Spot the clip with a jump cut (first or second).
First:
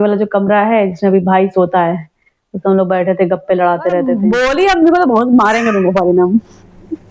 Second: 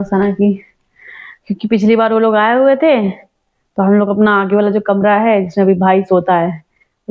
first